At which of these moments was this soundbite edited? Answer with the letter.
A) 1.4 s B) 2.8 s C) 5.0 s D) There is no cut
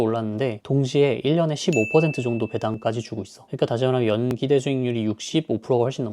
B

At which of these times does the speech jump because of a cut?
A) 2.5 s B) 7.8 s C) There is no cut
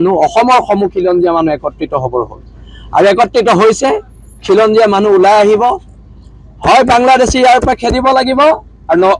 C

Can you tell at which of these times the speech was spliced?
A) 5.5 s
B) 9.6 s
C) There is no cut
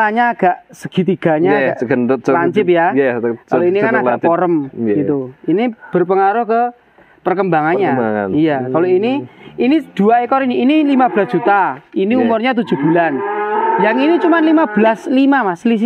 C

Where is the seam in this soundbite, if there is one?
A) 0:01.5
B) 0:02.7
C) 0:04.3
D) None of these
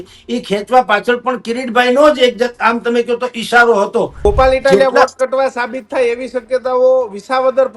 C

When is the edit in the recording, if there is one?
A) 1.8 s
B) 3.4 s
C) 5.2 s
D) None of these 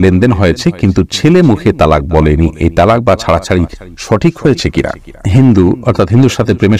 C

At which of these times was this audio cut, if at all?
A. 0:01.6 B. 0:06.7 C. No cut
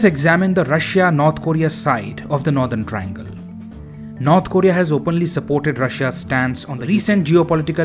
B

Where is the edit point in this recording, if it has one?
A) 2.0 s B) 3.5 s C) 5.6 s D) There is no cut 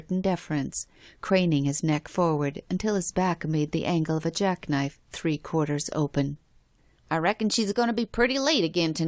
B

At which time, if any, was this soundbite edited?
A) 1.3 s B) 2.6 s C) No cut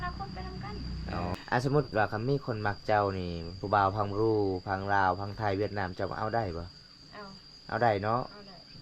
A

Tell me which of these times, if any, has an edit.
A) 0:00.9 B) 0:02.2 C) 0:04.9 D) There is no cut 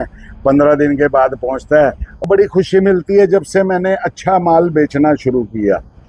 B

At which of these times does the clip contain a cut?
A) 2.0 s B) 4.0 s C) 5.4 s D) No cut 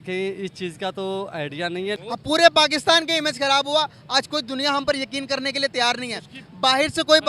A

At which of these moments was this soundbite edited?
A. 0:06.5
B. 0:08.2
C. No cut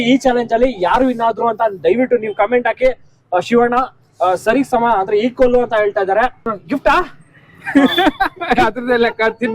A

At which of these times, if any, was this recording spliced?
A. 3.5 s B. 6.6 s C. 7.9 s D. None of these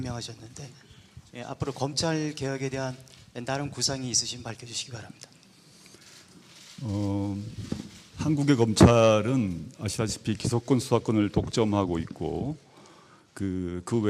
B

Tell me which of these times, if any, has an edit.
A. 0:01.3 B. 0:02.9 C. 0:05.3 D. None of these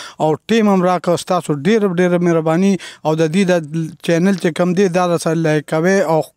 D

